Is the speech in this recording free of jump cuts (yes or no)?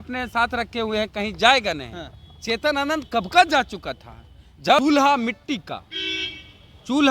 no